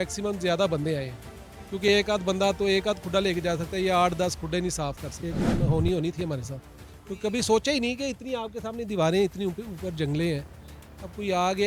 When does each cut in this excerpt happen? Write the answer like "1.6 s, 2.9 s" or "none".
5.5 s